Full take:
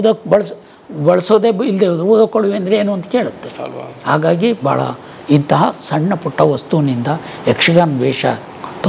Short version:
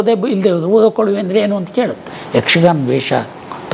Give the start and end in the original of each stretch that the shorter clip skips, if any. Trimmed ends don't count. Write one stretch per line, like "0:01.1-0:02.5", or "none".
0:03.5-0:07.3